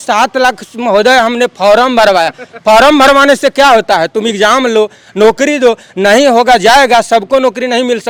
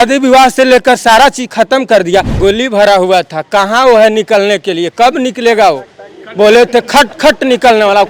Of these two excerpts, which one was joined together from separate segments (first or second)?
second